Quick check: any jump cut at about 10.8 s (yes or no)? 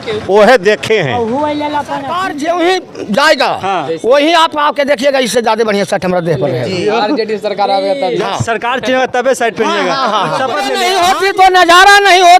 yes